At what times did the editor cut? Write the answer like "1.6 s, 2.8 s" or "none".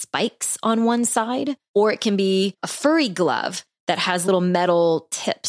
1.6 s, 2.7 s, 4.3 s